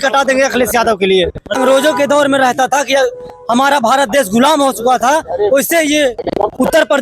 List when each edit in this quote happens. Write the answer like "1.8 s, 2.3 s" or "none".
1.6 s